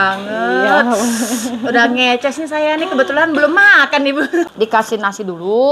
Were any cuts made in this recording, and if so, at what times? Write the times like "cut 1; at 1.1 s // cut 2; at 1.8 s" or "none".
cut 1; at 4.5 s

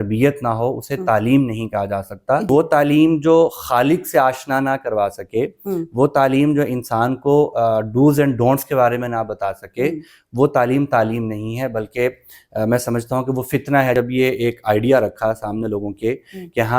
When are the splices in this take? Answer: cut 1; at 2.5 s // cut 2; at 13.9 s

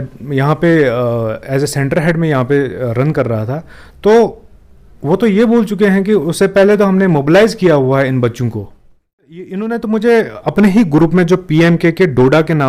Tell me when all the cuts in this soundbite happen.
cut 1; at 9.4 s

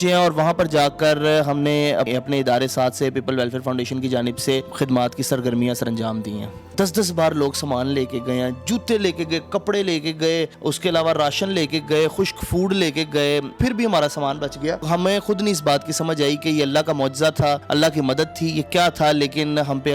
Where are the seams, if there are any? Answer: cut 1; at 2.1 s // cut 2; at 4.7 s // cut 3; at 6.7 s // cut 4; at 10.5 s // cut 5; at 13.5 s // cut 6; at 14.8 s // cut 7; at 17.6 s

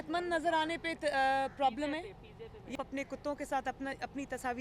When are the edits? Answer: cut 1; at 2.7 s

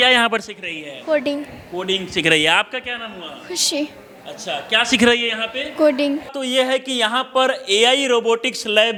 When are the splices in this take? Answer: none

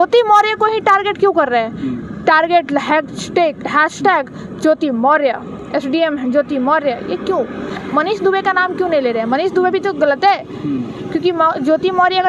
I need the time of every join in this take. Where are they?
none

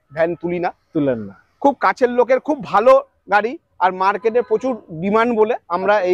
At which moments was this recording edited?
none

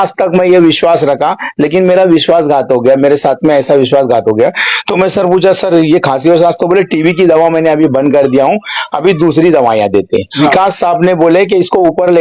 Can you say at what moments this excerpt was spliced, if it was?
cut 1; at 10.4 s

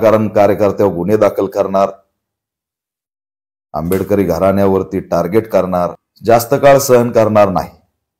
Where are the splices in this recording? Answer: cut 1; at 6.1 s

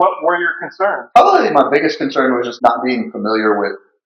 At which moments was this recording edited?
cut 1; at 1.0 s // cut 2; at 2.5 s

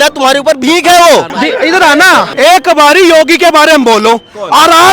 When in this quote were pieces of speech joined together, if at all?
cut 1; at 1.3 s // cut 2; at 2.3 s

